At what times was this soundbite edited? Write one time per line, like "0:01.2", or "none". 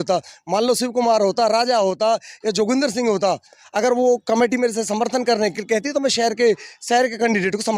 none